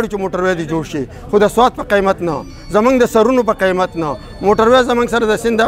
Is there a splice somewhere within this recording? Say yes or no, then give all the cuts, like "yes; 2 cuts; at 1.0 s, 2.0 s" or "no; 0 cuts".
no; 0 cuts